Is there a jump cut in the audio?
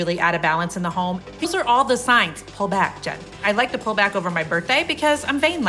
yes; 2 cuts; at 1.5 s, 3.3 s

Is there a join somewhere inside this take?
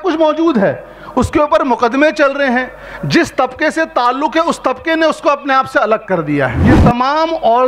yes; 1 cut; at 6.7 s

